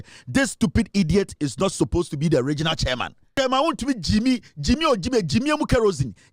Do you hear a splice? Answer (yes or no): yes